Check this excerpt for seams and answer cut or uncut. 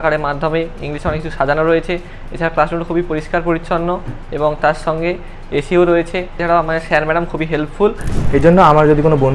cut